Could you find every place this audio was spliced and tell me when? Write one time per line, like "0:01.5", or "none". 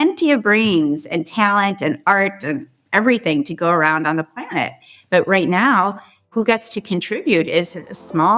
0:06.3

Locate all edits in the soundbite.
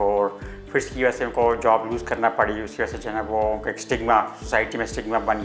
none

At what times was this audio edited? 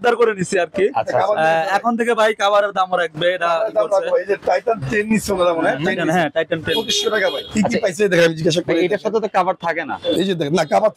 none

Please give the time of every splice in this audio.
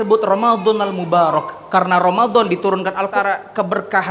0:03.1

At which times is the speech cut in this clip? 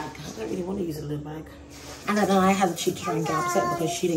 0:01.9

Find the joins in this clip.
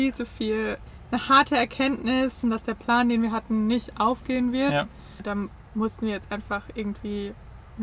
0:00.9
0:02.4
0:05.2

